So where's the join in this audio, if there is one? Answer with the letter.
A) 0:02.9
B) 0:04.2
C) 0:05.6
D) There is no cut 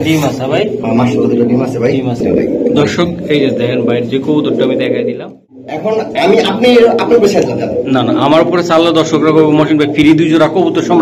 C